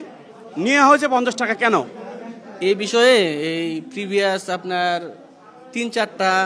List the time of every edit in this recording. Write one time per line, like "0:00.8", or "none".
none